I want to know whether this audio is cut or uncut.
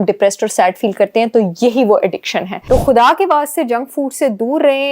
cut